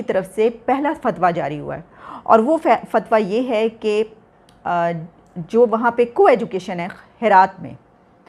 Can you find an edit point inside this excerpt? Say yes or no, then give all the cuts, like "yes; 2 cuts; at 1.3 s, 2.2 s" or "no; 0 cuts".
no; 0 cuts